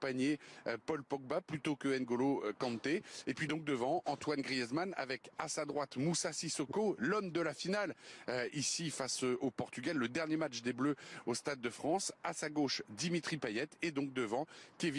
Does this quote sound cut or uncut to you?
uncut